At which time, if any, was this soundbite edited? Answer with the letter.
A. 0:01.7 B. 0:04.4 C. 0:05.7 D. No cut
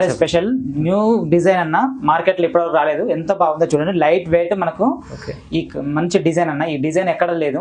D